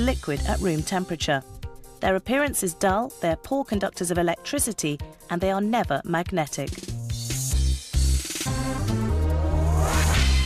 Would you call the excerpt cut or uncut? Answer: cut